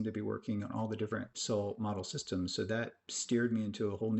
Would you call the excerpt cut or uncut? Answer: cut